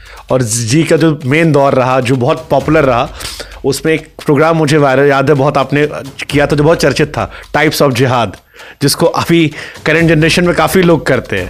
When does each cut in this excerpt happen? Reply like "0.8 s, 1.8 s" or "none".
none